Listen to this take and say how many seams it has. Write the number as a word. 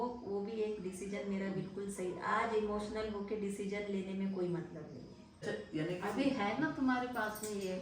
one